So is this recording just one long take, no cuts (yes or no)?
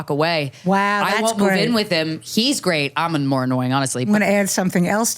no